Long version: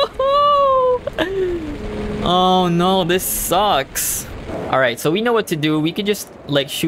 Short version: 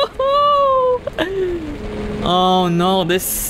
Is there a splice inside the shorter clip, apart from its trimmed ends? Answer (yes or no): no